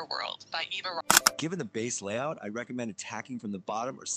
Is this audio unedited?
no; 1 cut; at 1.0 s

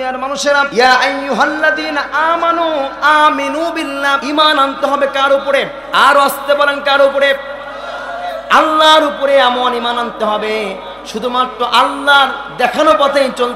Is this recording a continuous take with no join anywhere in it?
no; 1 cut; at 4.2 s

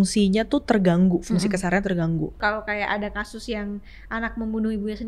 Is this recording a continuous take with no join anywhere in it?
no; 1 cut; at 2.4 s

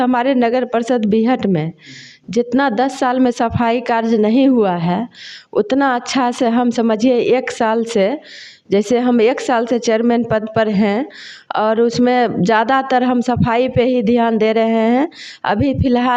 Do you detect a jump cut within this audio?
no; 0 cuts

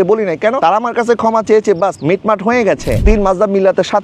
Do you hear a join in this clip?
yes; 2 cuts; at 2.0 s, 3.0 s

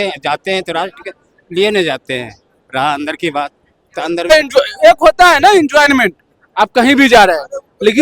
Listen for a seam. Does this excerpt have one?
yes; 1 cut; at 4.3 s

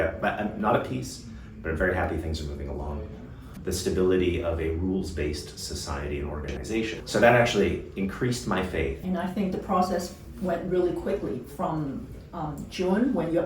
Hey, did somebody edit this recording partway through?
yes; 3 cuts; at 3.6 s, 6.9 s, 9.0 s

